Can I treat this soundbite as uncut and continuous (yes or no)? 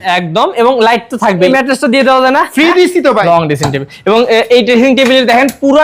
no